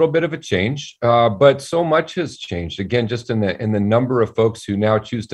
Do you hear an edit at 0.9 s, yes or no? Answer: no